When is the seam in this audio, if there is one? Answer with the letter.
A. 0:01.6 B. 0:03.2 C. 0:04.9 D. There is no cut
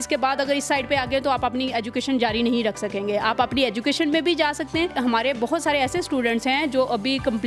C